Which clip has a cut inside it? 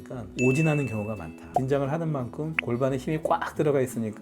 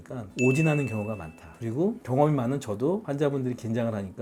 first; 1 cut; at 1.4 s

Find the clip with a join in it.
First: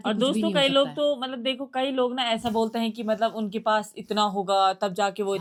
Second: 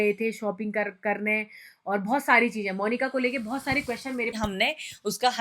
second; 1 cut; at 4.3 s

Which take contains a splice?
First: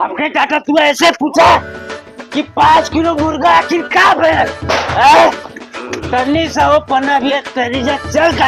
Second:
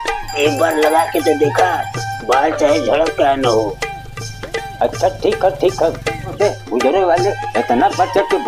second; 1 cut; at 6.3 s

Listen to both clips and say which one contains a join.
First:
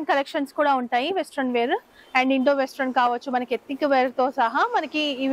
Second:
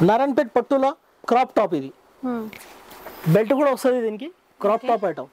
second; 1 cut; at 1.1 s

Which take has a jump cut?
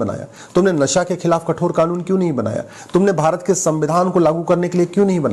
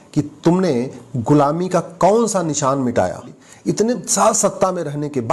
second; 1 cut; at 3.5 s

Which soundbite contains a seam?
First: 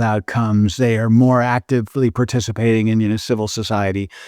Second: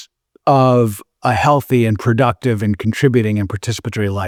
first; 1 cut; at 3.2 s

